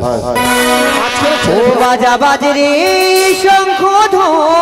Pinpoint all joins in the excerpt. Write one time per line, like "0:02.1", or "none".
0:01.5